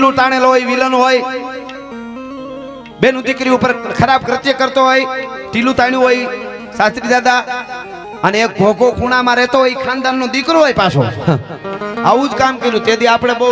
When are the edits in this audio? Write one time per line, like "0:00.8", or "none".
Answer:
none